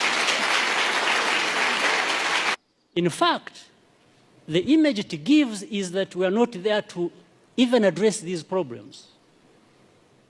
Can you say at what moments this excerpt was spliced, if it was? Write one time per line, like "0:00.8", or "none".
0:02.5